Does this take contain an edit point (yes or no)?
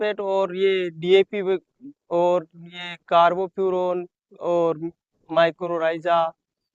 no